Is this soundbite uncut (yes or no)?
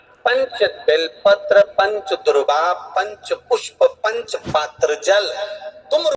yes